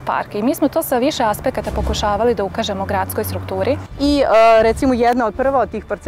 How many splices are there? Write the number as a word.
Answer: one